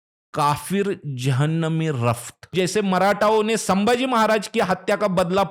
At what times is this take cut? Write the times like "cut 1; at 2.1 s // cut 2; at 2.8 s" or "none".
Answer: cut 1; at 2.4 s